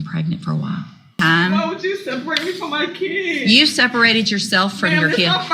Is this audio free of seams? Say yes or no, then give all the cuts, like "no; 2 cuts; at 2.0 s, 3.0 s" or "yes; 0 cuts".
no; 1 cut; at 1.2 s